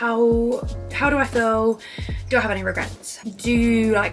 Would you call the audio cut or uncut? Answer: cut